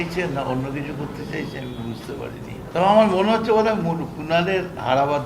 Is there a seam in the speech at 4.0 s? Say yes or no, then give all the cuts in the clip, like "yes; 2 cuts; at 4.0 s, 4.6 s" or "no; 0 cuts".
no; 1 cut; at 2.7 s